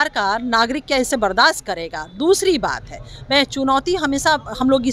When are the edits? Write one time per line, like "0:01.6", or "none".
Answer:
none